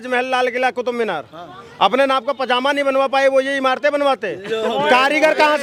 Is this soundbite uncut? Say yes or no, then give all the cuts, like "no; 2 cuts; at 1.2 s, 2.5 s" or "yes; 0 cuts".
yes; 0 cuts